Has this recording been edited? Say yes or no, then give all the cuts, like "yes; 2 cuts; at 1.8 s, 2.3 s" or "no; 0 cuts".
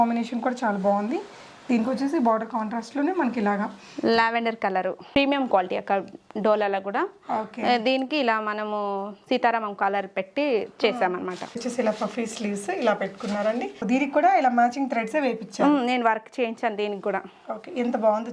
yes; 3 cuts; at 5.0 s, 11.6 s, 13.8 s